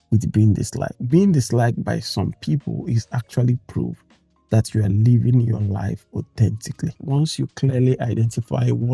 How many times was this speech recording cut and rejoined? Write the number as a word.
two